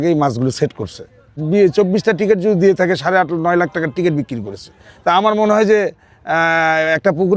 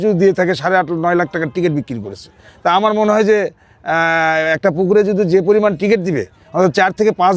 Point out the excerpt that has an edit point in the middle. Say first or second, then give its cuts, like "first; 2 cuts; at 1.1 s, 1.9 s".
first; 1 cut; at 1.4 s